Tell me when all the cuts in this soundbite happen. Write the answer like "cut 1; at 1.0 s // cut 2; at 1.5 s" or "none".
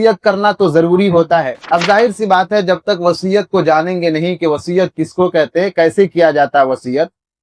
cut 1; at 1.6 s